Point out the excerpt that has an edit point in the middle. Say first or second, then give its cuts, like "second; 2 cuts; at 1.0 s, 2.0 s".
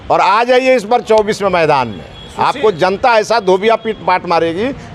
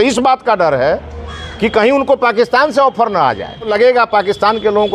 second; 1 cut; at 3.7 s